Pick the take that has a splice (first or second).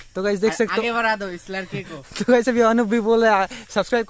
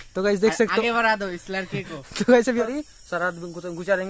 second